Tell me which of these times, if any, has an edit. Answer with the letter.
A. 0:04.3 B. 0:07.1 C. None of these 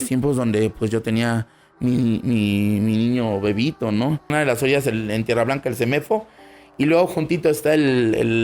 A